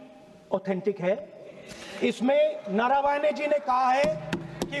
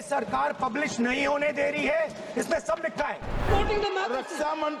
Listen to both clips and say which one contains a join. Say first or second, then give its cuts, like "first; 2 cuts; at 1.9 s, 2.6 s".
second; 1 cut; at 3.4 s